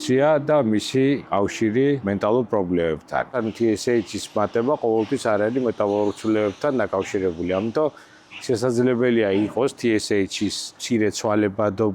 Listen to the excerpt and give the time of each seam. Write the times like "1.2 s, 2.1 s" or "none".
1.2 s, 2.0 s, 3.3 s, 10.7 s